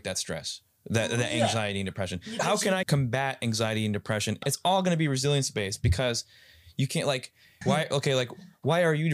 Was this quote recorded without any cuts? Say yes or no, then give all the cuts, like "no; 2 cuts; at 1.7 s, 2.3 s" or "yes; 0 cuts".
no; 3 cuts; at 2.8 s, 4.4 s, 7.4 s